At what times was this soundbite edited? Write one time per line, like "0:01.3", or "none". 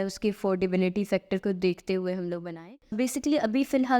0:02.9